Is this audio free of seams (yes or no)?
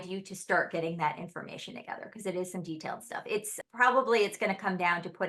yes